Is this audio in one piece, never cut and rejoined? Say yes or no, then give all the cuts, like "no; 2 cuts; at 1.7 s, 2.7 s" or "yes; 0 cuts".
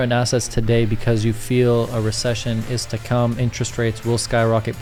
yes; 0 cuts